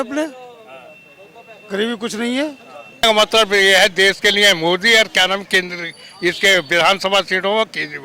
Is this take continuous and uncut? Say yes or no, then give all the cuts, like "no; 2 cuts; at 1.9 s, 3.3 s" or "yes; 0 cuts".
no; 1 cut; at 3.0 s